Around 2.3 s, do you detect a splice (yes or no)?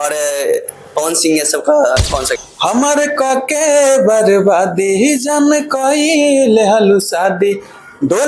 yes